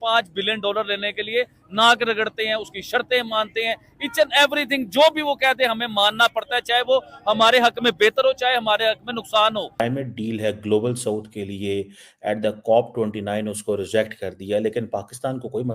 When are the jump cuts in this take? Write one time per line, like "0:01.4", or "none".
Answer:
0:09.8

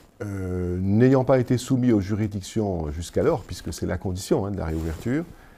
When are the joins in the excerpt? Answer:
none

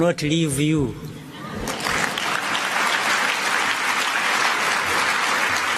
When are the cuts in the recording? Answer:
none

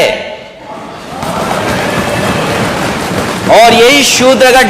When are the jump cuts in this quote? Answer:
none

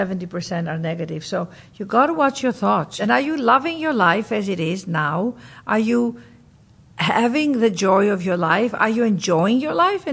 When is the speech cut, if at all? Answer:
0:02.9

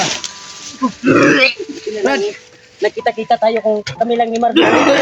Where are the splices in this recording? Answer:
none

